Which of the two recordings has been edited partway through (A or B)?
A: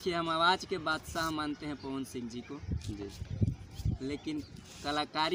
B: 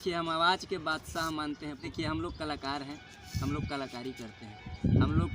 B